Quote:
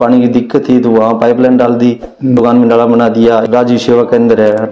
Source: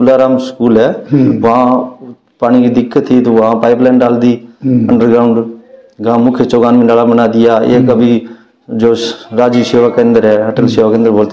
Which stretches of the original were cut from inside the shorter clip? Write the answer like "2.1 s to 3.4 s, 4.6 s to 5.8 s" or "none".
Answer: 4.8 s to 6.6 s, 7.6 s to 9.3 s

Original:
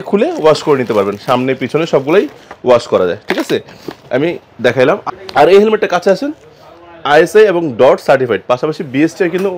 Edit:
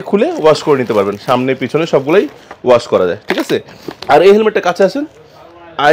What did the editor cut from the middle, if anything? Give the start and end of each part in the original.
3.9 s to 5.2 s

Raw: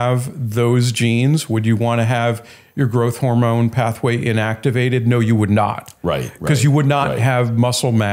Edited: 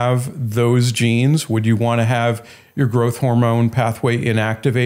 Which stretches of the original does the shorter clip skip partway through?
none

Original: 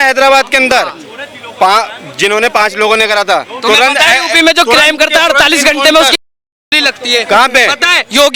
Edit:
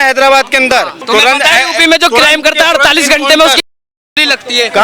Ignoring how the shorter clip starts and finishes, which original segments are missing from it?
1.0 s to 3.5 s

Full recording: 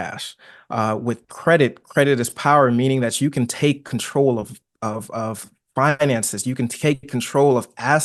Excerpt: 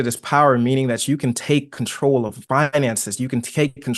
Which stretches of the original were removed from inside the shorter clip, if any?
4.5 s to 5.6 s

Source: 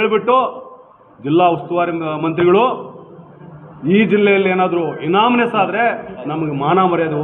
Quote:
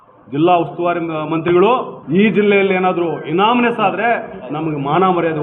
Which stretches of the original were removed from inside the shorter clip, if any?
2.9 s to 3.7 s

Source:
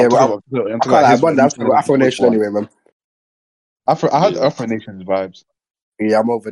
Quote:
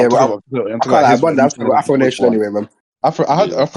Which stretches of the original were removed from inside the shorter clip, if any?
2.8 s to 3.7 s

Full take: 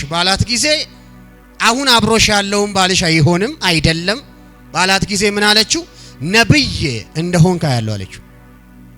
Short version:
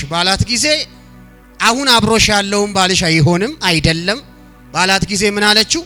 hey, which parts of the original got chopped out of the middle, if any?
none

